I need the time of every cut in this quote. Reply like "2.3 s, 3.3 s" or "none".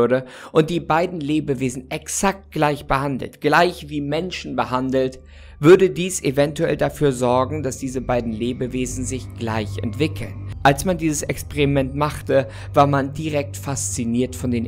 10.4 s